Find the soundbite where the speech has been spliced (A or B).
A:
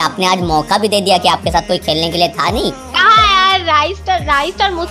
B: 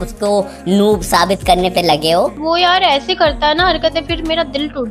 B